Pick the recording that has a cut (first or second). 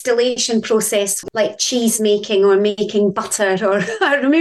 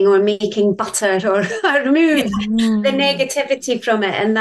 first